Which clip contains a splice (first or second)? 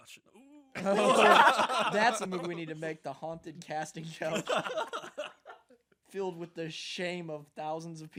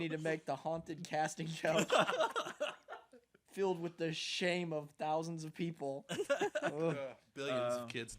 second